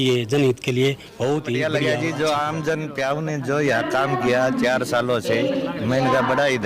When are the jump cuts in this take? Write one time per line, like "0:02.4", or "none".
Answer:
0:01.6